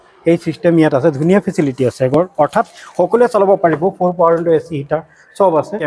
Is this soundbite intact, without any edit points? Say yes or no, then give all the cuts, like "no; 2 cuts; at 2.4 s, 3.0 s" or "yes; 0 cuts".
yes; 0 cuts